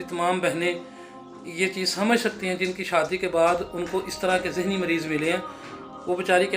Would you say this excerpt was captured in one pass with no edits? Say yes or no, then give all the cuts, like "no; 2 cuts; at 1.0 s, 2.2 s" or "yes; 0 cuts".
yes; 0 cuts